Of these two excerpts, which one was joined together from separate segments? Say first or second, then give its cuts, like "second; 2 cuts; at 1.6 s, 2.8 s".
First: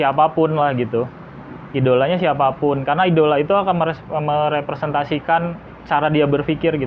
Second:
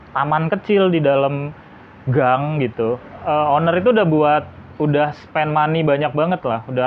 second; 1 cut; at 3.1 s